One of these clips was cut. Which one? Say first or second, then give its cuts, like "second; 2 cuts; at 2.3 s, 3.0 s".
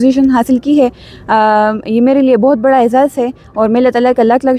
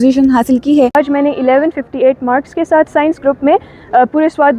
second; 1 cut; at 0.9 s